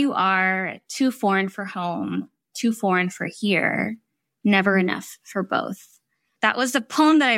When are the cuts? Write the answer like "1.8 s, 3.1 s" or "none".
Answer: 6.3 s